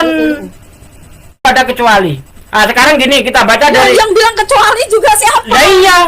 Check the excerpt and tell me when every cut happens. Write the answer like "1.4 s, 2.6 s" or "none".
1.4 s